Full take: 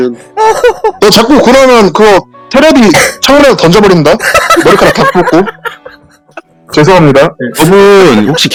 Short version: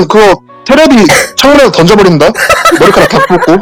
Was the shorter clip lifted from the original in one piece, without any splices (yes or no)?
yes